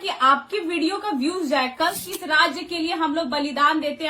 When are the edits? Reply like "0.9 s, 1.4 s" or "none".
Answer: 2.0 s